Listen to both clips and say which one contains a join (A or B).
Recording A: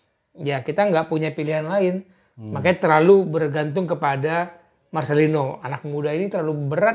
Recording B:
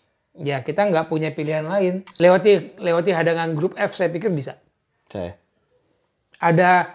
B